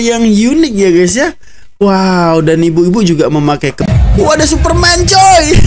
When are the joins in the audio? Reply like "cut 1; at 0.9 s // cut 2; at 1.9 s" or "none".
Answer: cut 1; at 3.8 s